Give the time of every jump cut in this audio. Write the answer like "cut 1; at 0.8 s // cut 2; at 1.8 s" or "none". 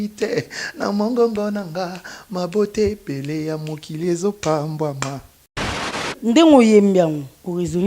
cut 1; at 5.7 s